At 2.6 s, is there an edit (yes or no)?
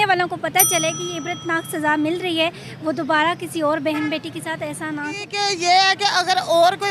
no